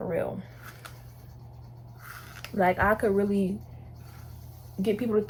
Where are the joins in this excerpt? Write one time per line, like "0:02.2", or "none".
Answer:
none

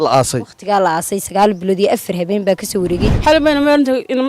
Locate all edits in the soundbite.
0:03.0

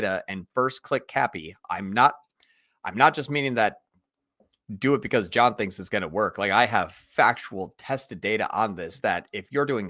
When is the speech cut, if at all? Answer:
none

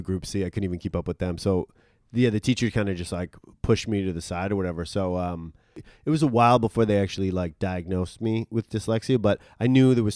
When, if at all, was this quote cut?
0:05.9

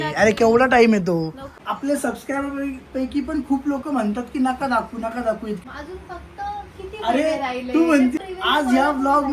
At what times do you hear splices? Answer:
0:01.5
0:05.6
0:08.2

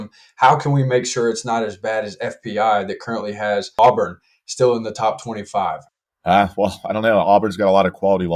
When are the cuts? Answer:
0:03.8
0:05.8

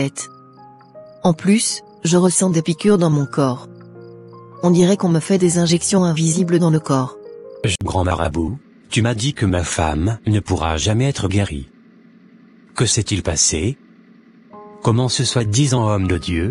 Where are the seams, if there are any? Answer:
0:07.7

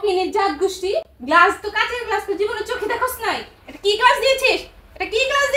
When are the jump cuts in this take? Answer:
none

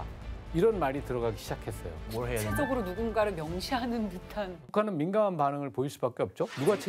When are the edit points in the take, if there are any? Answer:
0:04.7

